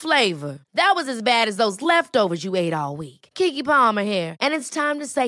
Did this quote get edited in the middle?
no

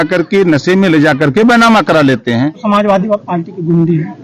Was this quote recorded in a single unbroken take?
no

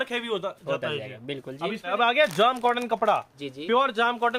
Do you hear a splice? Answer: yes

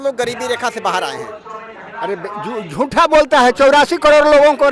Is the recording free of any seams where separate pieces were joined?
yes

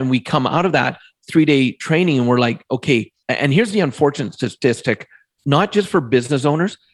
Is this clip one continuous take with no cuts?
no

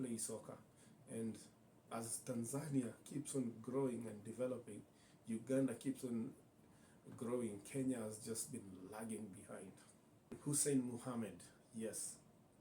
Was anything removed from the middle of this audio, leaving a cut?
yes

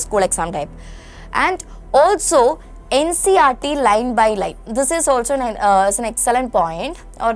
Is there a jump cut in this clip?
no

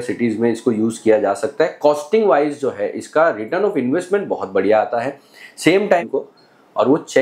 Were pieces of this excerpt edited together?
yes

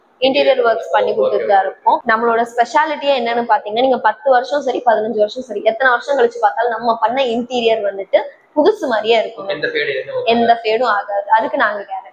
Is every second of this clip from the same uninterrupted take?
yes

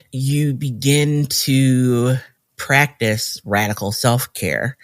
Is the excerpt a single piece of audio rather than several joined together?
yes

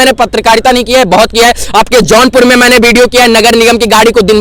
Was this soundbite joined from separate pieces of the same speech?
no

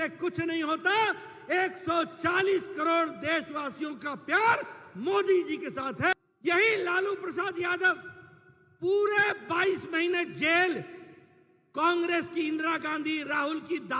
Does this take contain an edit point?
yes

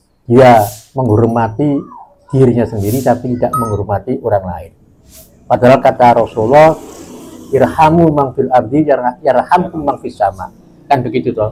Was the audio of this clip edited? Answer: no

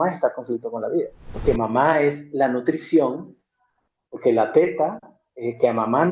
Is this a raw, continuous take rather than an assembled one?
no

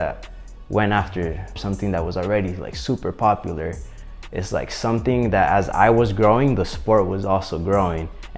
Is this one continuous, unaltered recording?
no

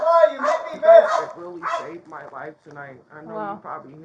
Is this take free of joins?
no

